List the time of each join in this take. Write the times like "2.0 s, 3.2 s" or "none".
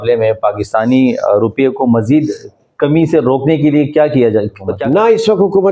4.7 s